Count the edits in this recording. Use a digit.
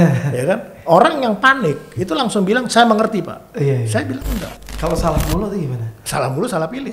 1